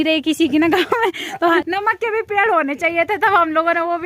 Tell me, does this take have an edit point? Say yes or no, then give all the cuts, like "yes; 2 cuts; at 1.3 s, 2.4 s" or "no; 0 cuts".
yes; 1 cut; at 1.6 s